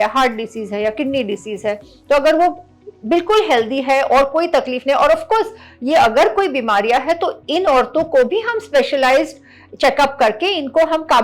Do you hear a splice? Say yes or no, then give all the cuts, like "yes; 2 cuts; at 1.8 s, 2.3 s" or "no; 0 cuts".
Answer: no; 0 cuts